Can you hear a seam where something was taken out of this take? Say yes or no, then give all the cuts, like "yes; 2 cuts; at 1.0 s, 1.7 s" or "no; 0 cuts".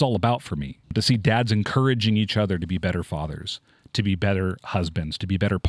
yes; 1 cut; at 0.9 s